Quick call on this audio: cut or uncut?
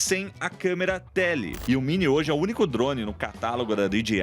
cut